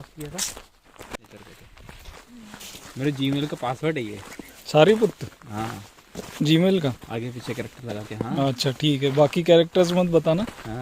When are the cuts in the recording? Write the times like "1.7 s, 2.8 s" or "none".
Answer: 1.2 s